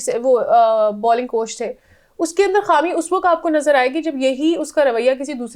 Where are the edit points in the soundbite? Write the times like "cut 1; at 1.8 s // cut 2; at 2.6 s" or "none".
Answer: none